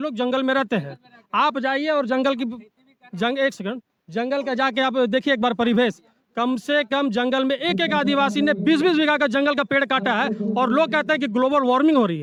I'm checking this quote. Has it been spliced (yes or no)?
no